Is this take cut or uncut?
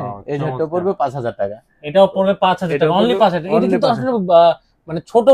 uncut